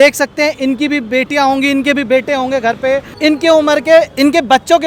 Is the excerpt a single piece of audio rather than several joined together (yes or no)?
no